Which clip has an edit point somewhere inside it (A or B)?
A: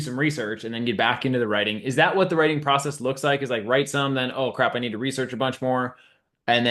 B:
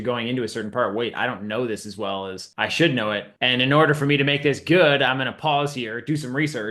B